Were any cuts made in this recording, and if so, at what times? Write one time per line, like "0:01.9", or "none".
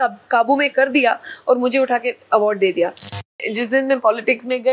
0:03.2